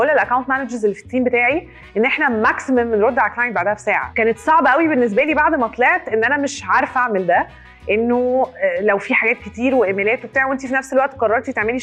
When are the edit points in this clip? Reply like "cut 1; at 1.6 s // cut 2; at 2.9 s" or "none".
none